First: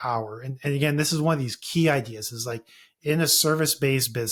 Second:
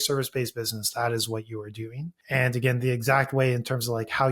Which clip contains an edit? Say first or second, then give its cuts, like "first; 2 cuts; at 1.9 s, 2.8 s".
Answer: second; 1 cut; at 2.1 s